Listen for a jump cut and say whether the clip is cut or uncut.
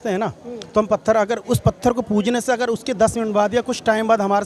uncut